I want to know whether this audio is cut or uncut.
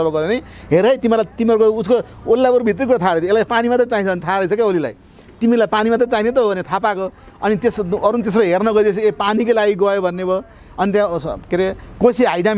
uncut